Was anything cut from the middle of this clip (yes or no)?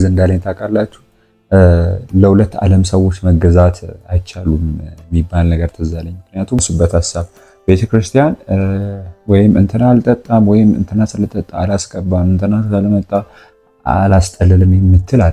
yes